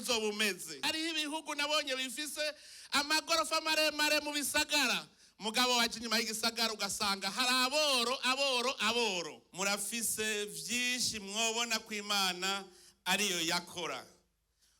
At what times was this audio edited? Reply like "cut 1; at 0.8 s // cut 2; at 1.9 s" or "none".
cut 1; at 0.8 s // cut 2; at 9.4 s